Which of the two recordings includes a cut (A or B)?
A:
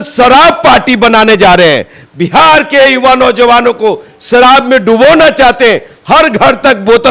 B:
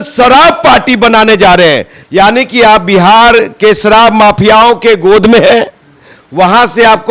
B